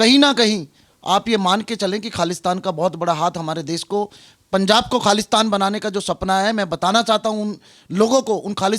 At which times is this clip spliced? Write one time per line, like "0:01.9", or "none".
none